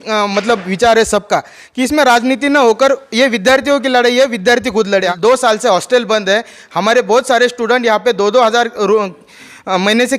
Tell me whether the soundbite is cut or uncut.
cut